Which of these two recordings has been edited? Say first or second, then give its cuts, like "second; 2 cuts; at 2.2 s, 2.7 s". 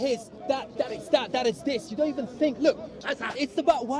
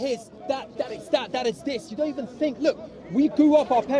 first; 1 cut; at 3.0 s